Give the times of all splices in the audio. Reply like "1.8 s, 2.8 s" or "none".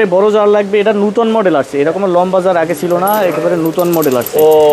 none